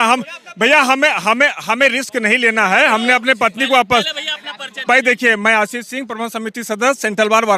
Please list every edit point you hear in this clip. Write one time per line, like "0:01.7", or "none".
none

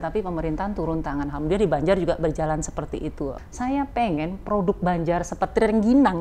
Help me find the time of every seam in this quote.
0:03.4

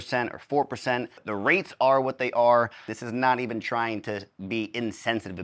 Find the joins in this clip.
0:01.2
0:03.0

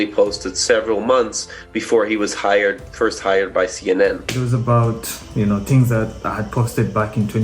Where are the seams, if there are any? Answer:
0:04.4

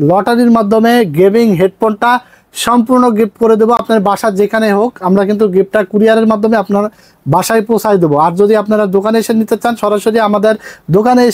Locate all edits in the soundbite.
none

